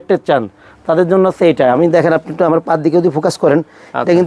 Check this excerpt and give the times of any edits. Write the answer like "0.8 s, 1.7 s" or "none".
none